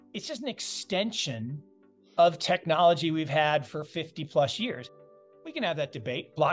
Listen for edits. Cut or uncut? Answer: cut